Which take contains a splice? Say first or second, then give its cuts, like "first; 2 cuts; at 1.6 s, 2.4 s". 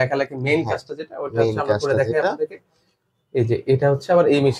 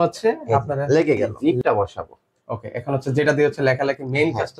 second; 1 cut; at 1.3 s